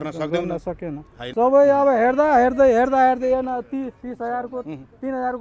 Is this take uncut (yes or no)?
no